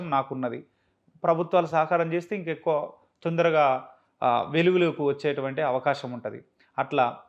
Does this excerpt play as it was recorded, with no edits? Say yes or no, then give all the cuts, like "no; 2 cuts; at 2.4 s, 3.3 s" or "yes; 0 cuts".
yes; 0 cuts